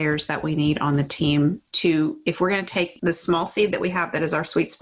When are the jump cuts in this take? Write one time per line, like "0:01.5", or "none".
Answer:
0:02.9